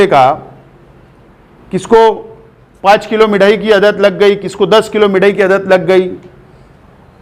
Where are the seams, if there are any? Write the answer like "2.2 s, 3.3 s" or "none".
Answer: none